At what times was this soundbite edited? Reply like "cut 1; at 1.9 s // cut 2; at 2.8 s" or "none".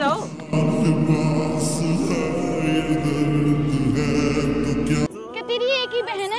cut 1; at 5.1 s